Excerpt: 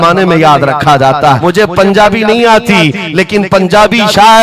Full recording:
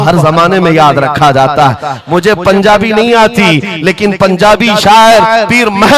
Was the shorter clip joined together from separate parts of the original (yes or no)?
yes